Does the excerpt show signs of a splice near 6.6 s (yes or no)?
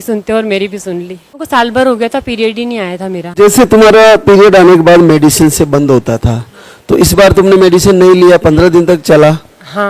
no